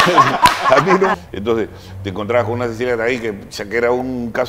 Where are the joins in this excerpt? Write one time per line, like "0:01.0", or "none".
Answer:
0:01.1